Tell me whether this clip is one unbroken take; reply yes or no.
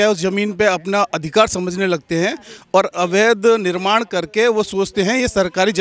yes